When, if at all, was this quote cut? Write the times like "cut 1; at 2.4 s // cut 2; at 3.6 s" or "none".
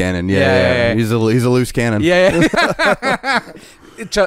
cut 1; at 2.5 s